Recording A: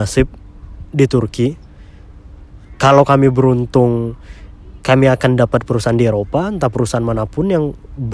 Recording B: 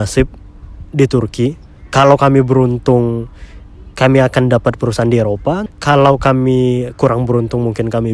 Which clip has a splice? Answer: B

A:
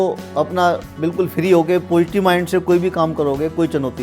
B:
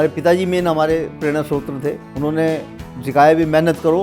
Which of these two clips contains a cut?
B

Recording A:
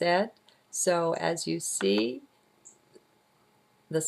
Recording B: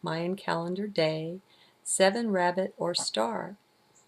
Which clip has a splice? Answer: A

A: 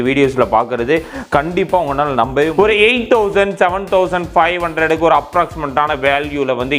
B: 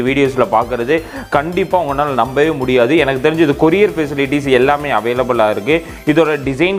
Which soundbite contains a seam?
A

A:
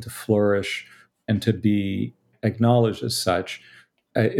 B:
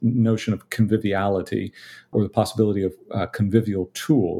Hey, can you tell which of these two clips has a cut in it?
B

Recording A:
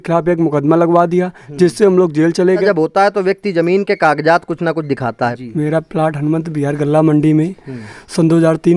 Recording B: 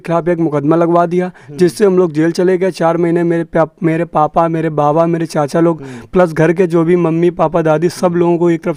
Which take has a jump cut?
A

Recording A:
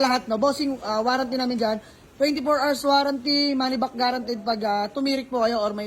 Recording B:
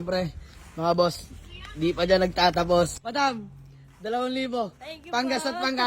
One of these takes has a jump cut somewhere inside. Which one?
B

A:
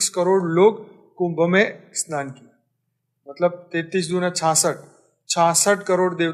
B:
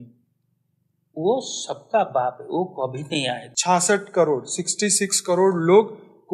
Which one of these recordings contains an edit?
B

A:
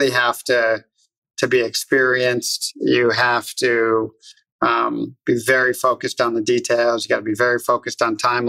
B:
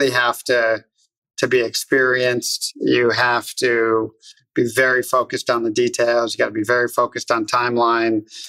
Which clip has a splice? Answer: B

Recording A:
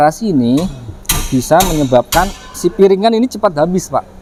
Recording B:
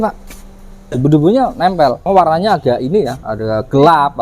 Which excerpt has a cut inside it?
B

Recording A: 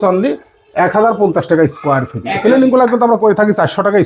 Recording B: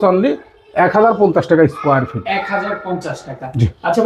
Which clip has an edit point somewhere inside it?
A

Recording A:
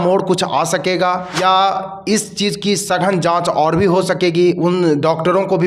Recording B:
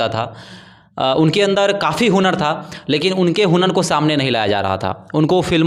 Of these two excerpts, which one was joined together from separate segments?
A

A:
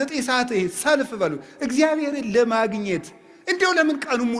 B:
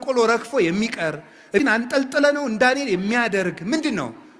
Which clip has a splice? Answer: B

